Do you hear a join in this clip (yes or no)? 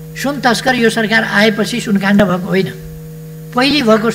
no